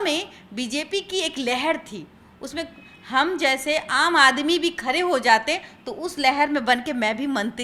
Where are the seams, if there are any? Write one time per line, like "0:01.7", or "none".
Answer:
none